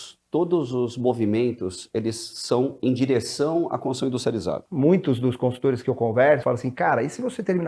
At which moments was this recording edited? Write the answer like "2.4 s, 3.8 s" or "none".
4.7 s, 6.4 s